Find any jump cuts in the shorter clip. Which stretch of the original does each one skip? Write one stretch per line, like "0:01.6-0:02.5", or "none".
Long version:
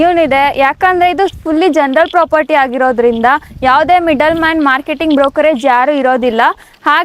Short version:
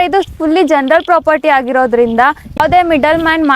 0:03.6-0:03.7